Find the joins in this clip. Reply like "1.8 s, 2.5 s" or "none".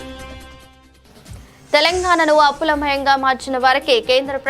1.6 s